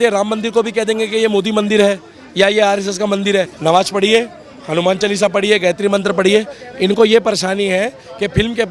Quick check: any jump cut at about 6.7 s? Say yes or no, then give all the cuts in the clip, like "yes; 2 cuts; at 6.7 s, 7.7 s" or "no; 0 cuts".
no; 1 cut; at 3.5 s